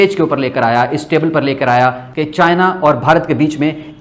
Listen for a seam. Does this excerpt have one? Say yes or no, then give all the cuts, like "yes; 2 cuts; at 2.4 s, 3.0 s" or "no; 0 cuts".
no; 0 cuts